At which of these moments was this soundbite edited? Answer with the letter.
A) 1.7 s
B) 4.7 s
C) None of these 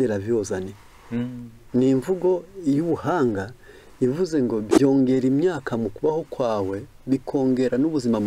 B